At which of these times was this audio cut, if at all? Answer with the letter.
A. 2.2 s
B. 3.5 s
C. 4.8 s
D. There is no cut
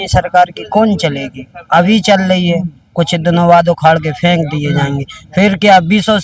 D